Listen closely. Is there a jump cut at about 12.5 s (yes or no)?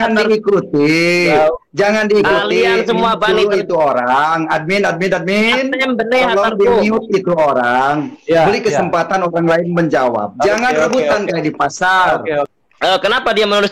yes